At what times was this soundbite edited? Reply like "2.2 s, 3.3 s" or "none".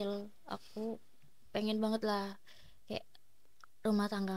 none

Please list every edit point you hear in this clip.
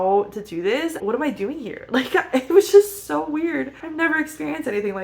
1.0 s, 3.8 s

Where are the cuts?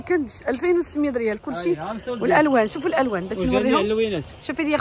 none

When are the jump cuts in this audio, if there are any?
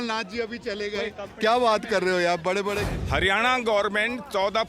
2.9 s

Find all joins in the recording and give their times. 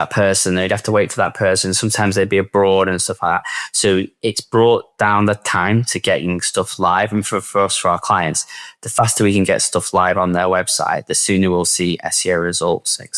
none

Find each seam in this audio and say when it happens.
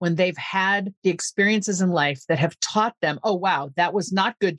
0.9 s

